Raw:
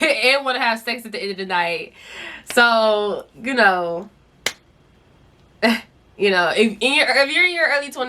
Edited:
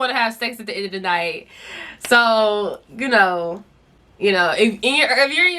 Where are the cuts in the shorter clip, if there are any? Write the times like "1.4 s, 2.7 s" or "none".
4.0 s